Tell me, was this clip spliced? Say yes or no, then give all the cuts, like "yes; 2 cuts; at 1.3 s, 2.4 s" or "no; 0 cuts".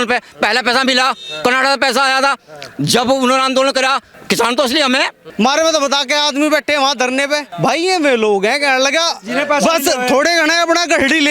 yes; 3 cuts; at 4.1 s, 5.2 s, 7.5 s